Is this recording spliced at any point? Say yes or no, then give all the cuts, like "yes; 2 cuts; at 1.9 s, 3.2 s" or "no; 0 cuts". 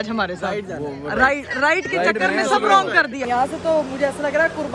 yes; 1 cut; at 3.2 s